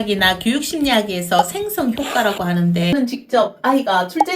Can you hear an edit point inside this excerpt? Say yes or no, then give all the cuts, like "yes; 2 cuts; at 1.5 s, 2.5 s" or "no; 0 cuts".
yes; 1 cut; at 2.9 s